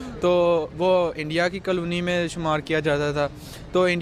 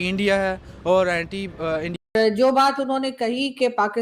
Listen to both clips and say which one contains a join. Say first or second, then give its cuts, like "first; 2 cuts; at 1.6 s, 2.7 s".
second; 1 cut; at 1.9 s